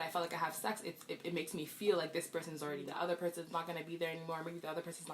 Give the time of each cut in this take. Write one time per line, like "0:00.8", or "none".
0:02.9